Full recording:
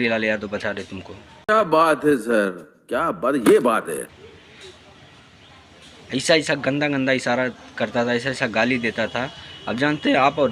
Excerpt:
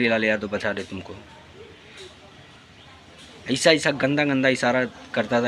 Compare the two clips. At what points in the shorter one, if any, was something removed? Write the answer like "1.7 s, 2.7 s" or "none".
1.3 s

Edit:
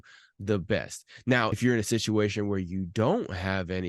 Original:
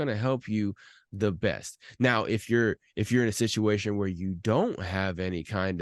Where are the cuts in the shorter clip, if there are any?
1.5 s

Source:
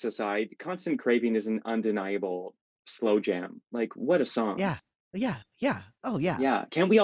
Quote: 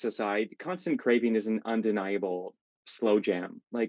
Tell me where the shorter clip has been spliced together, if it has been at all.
none

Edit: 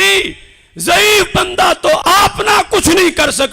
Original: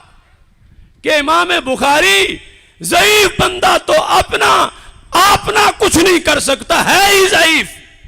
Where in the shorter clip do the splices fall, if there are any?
2.0 s

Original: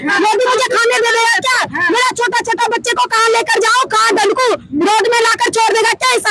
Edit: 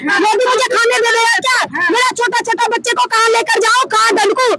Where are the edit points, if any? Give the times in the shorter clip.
none

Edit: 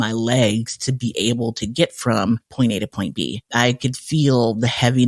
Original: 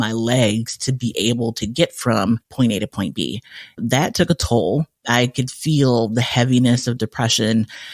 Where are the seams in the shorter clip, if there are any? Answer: 3.4 s

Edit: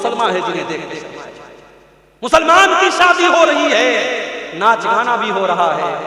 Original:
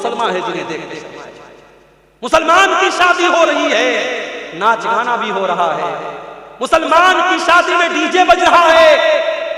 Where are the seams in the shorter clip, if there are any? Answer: none

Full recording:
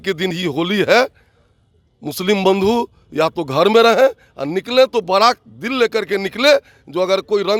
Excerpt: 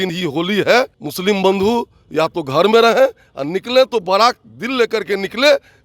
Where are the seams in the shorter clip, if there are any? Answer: 1.0 s

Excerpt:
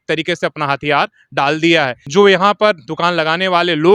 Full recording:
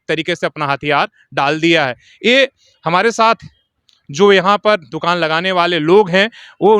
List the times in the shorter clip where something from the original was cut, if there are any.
2.0 s

